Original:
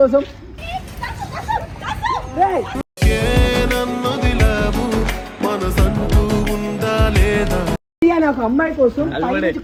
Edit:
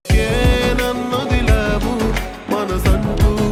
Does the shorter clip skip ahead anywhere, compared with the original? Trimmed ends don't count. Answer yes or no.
no